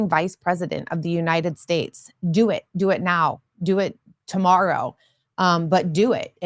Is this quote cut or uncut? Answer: uncut